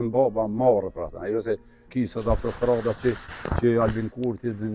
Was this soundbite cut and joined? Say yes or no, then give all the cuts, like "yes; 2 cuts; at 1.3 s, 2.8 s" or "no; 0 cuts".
no; 0 cuts